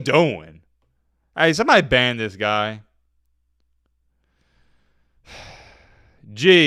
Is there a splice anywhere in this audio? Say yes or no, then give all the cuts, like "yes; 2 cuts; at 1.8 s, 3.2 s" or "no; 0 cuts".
no; 0 cuts